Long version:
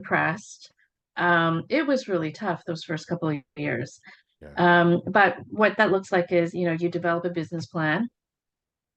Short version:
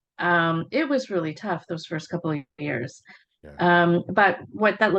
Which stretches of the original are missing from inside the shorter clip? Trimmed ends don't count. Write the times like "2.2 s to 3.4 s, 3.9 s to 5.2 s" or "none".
none